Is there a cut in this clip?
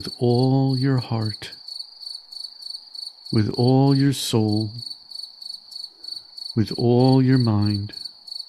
no; 0 cuts

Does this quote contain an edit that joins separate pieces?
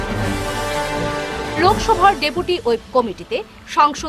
yes; 1 cut; at 1.1 s

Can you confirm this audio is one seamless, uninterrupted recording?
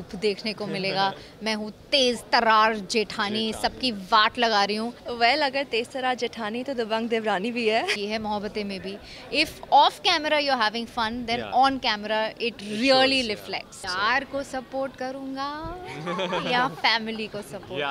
no; 3 cuts; at 5.0 s, 8.0 s, 13.8 s

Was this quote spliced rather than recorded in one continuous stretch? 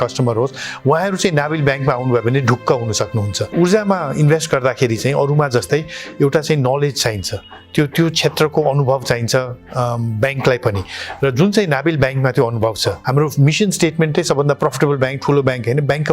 yes; 2 cuts; at 3.5 s, 13.0 s

